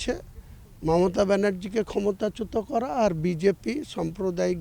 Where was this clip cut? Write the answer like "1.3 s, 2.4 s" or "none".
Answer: none